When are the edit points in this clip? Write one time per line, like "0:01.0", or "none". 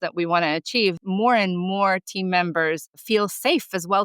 0:01.0
0:03.0

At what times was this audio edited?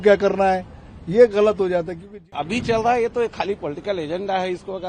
0:02.3

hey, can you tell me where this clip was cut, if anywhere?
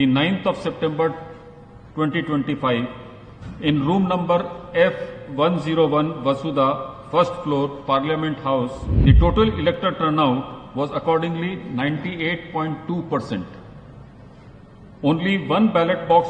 0:08.8

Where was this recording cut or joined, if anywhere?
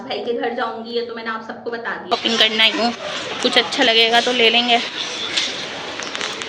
0:02.1

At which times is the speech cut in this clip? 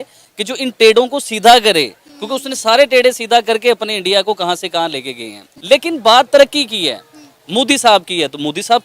0:05.6

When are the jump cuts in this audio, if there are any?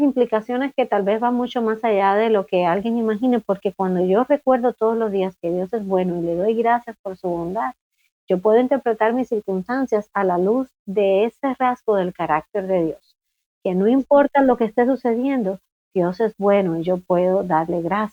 none

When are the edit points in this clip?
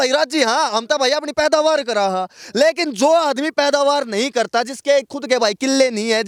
none

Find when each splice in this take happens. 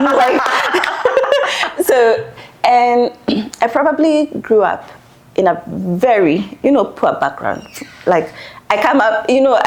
none

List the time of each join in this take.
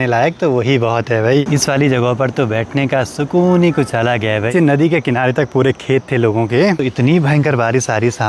0:01.5
0:04.5
0:06.8

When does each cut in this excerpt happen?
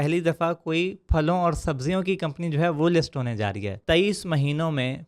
0:03.8

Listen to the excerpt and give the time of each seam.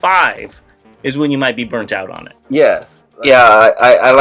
0:03.0

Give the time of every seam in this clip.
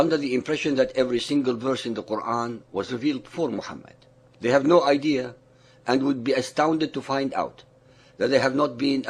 0:08.1

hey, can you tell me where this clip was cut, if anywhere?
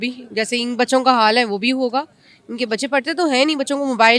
none

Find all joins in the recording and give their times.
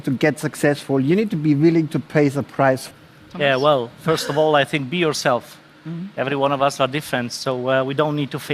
0:02.9

